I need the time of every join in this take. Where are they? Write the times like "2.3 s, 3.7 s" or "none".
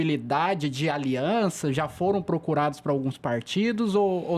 none